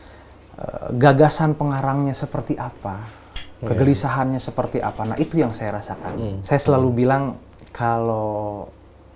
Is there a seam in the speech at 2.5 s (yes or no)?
no